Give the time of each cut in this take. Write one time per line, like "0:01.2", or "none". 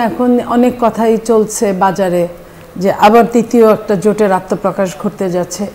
none